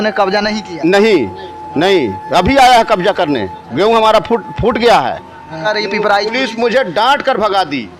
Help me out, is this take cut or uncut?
cut